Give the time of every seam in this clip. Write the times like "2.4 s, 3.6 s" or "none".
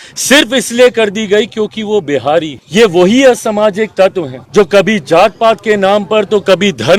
2.6 s, 4.3 s